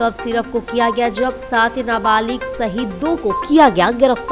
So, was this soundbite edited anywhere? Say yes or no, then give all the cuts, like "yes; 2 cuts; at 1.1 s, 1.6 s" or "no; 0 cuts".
no; 0 cuts